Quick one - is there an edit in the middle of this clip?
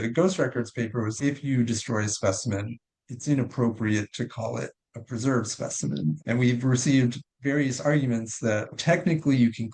yes; 2 cuts; at 1.2 s, 8.7 s

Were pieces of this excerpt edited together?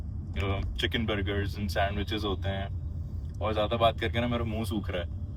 no; 0 cuts

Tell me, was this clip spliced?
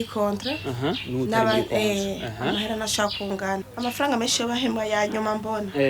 yes; 1 cut; at 3.7 s

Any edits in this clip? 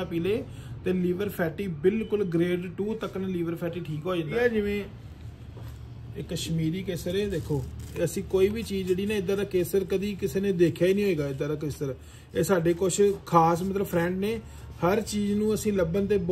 yes; 1 cut; at 4.3 s

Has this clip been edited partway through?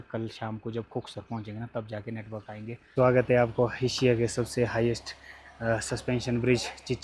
yes; 1 cut; at 2.9 s

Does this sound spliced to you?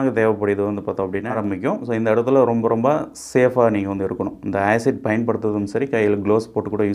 yes; 1 cut; at 1.4 s

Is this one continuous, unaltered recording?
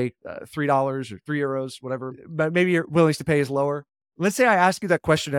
no; 1 cut; at 2.2 s

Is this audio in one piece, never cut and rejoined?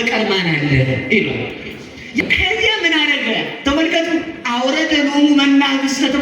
no; 1 cut; at 2.2 s

